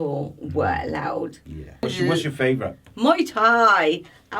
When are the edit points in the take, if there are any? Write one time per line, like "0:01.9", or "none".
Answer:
0:01.8